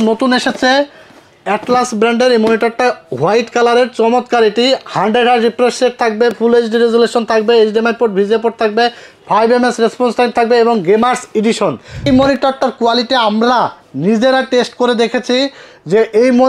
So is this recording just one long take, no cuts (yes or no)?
no